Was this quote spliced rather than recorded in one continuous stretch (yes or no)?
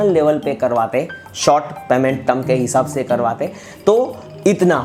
no